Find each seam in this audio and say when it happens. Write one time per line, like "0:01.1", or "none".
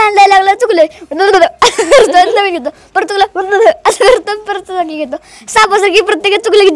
none